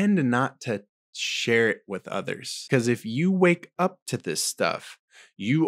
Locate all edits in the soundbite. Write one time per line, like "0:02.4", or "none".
0:02.7